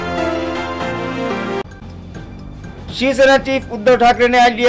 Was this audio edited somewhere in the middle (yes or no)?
yes